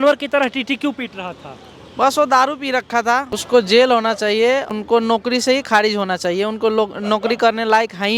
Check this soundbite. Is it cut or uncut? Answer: cut